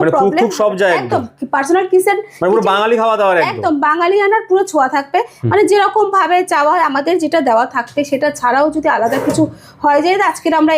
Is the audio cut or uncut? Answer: uncut